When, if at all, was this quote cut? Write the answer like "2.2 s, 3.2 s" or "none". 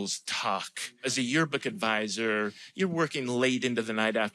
1.1 s, 2.6 s